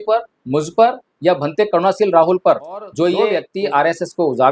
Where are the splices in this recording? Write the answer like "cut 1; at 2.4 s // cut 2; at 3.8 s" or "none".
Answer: cut 1; at 2.9 s